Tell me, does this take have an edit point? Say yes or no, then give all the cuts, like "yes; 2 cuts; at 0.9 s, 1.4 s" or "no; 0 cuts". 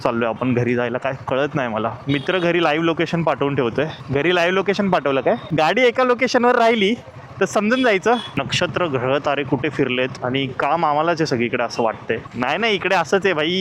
yes; 4 cuts; at 2.2 s, 5.5 s, 8.3 s, 12.2 s